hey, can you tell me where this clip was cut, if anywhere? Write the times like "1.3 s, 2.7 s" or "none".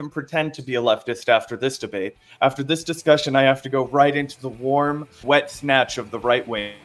5.1 s